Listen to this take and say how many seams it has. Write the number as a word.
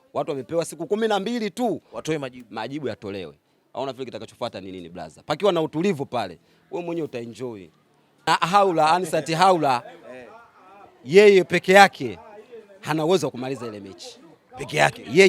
one